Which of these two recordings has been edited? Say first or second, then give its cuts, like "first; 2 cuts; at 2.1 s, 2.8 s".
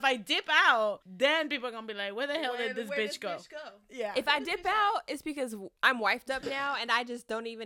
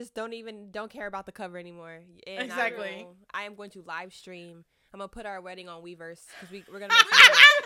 first; 2 cuts; at 1.1 s, 5.6 s